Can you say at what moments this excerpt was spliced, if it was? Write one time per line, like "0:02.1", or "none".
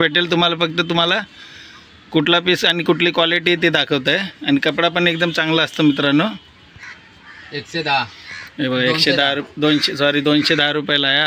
none